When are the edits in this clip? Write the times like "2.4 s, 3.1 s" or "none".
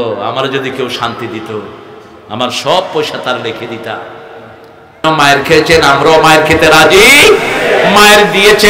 5.0 s